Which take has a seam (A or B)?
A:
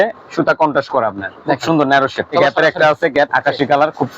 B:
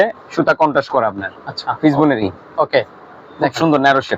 A